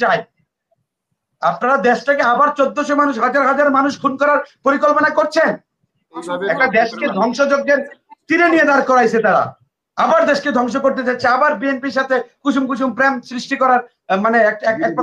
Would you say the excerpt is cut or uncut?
cut